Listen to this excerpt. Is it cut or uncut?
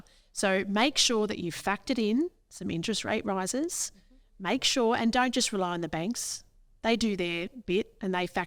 uncut